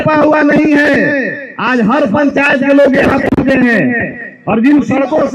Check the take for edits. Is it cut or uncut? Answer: uncut